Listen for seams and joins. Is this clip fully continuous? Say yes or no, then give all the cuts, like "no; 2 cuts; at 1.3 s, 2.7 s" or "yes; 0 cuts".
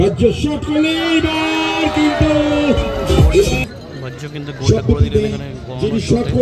yes; 0 cuts